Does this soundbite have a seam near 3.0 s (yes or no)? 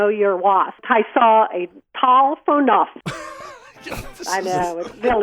yes